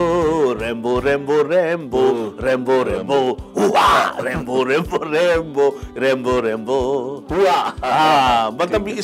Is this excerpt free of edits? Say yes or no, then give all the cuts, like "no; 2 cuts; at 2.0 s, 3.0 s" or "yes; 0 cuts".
yes; 0 cuts